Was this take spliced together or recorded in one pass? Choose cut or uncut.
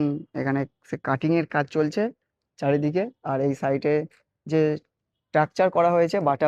uncut